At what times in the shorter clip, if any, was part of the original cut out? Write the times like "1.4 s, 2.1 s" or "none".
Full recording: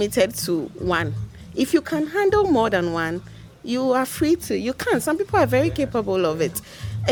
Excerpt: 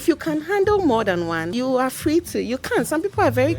1.5 s